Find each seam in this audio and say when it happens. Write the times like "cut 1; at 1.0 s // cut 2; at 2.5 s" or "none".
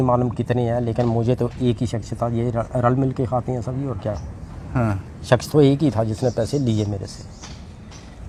none